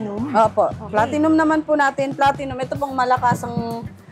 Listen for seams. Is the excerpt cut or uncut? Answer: uncut